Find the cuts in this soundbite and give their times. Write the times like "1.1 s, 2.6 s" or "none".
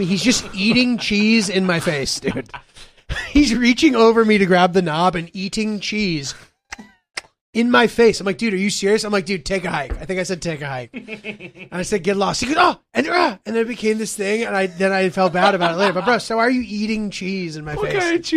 none